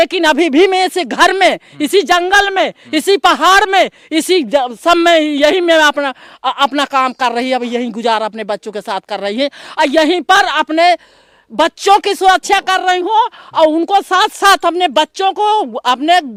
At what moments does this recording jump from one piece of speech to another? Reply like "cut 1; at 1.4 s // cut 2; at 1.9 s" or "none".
none

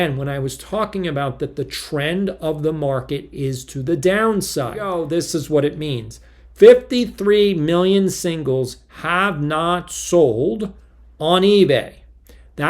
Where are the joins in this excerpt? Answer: cut 1; at 4.9 s

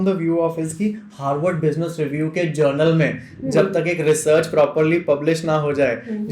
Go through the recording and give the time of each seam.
none

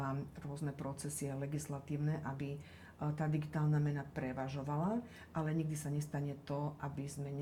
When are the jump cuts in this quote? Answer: none

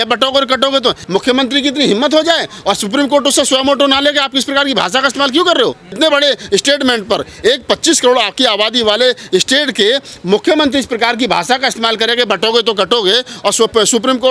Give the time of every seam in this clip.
cut 1; at 5.9 s

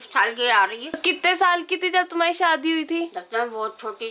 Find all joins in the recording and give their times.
cut 1; at 1.0 s

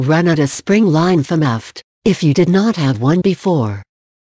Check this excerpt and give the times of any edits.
cut 1; at 1.2 s

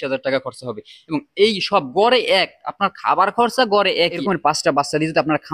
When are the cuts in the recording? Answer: cut 1; at 4.2 s

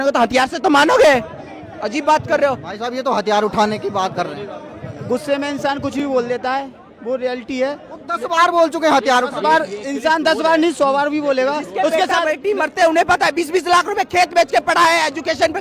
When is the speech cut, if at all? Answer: none

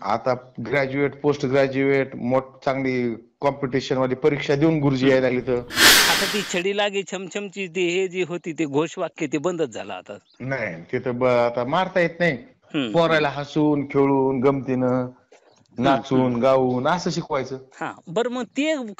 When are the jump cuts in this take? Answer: cut 1; at 5.9 s

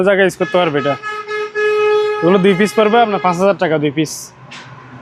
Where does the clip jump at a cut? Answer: none

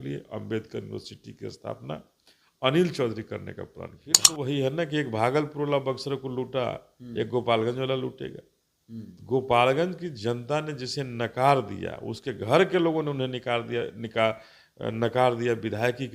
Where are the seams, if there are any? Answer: cut 1; at 4.3 s

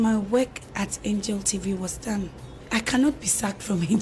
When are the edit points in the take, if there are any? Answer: cut 1; at 2.6 s

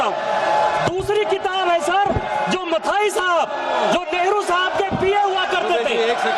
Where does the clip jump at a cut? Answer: cut 1; at 3.9 s

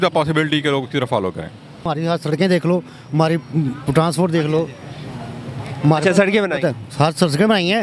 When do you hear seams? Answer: cut 1; at 1.9 s

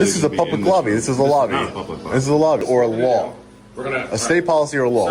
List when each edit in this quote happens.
cut 1; at 2.6 s

